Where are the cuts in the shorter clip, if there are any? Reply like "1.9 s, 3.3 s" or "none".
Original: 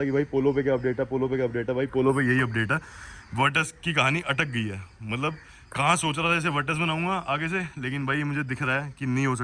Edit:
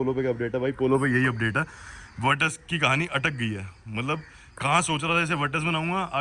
none